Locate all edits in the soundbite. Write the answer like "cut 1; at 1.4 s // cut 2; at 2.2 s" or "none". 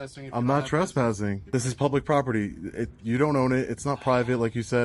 cut 1; at 1.4 s